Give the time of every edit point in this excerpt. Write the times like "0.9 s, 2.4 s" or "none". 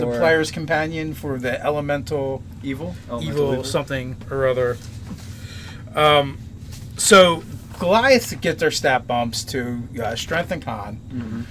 6.1 s